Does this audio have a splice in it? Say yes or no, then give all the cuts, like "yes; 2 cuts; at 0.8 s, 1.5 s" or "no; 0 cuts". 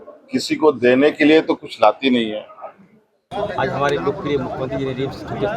yes; 1 cut; at 3.2 s